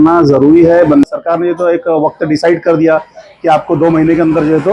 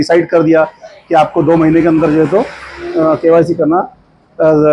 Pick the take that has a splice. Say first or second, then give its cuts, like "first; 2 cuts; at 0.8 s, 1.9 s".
first; 1 cut; at 1.0 s